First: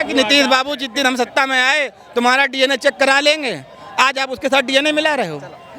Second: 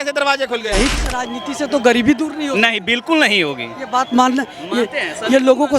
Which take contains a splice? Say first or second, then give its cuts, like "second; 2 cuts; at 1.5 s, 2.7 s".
second; 1 cut; at 0.9 s